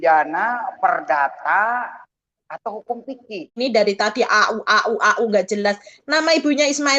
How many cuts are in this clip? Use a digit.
1